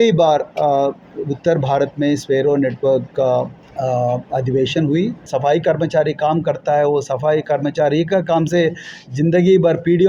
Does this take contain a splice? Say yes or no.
yes